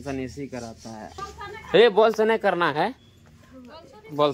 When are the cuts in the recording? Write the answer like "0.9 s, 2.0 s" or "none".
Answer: 1.2 s